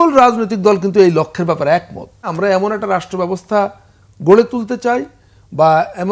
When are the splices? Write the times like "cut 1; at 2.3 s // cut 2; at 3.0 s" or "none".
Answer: cut 1; at 2.3 s